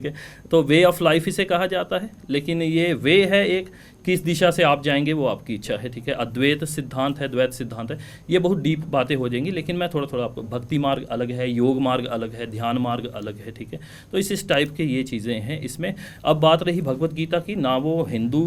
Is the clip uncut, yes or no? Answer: yes